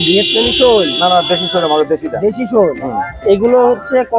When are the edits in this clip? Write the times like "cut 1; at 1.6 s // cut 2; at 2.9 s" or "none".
none